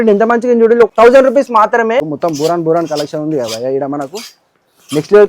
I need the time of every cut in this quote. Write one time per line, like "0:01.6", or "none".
0:00.9
0:02.1